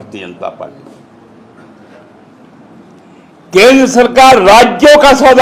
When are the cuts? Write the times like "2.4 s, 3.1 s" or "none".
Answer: none